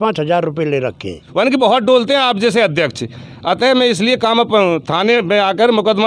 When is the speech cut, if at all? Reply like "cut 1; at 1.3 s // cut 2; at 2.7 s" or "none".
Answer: cut 1; at 1.2 s